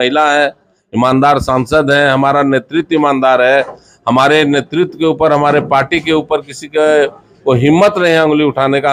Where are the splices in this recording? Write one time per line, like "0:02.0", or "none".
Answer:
none